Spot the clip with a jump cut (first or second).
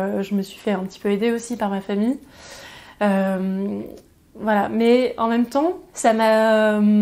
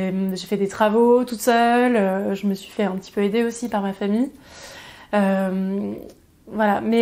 first